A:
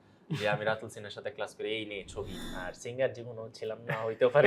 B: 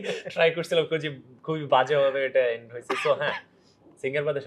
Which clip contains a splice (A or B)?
A